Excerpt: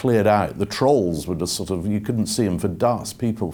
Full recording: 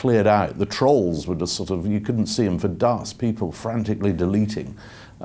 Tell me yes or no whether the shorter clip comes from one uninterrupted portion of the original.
yes